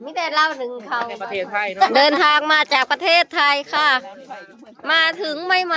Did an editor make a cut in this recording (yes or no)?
yes